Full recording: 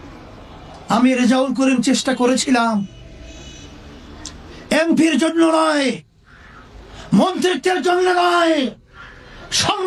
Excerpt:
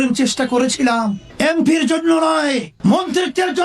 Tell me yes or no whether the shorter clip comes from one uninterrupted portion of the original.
no